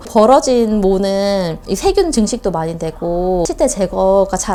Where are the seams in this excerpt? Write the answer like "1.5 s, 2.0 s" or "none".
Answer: none